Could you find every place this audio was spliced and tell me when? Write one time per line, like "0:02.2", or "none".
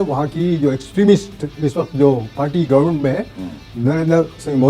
none